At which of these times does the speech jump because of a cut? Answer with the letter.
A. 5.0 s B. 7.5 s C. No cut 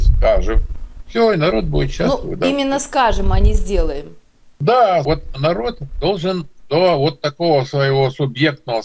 A